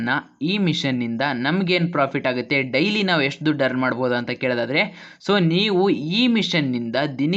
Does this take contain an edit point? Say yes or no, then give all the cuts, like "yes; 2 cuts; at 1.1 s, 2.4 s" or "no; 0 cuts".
no; 0 cuts